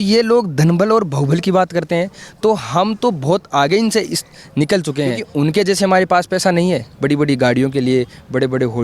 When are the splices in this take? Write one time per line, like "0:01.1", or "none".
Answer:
0:05.2